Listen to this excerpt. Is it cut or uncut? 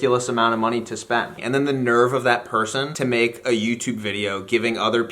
cut